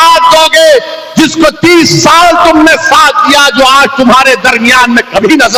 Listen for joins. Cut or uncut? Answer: uncut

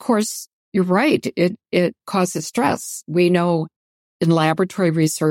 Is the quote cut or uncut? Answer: uncut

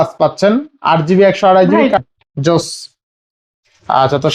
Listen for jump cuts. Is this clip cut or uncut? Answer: cut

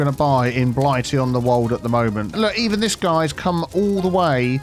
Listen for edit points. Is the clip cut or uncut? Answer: cut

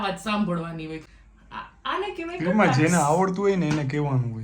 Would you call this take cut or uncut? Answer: cut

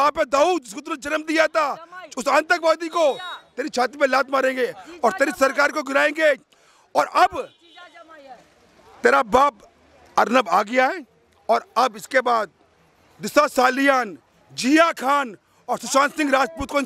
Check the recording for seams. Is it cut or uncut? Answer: uncut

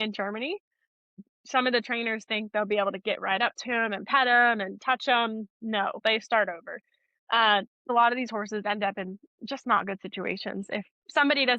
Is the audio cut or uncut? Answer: cut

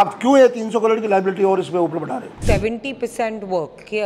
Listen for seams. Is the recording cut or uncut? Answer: cut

